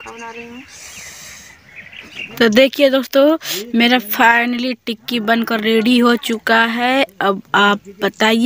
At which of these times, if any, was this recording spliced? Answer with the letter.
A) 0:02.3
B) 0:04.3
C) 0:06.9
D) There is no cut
A